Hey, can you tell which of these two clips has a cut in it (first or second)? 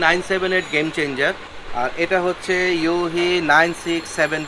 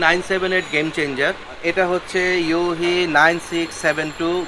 second